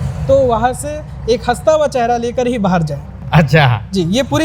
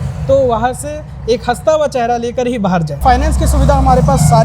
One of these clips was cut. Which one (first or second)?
second